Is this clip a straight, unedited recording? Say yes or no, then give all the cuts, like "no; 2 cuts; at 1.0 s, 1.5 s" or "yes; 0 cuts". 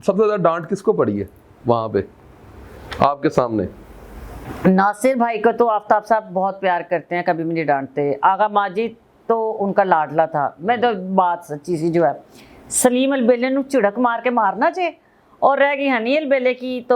yes; 0 cuts